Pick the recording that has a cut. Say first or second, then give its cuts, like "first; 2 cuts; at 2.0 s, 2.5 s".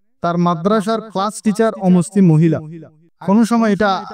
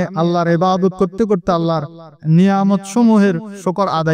first; 1 cut; at 3.1 s